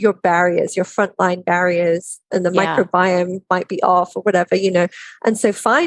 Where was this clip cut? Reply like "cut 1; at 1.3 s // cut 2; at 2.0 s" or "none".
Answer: cut 1; at 2.2 s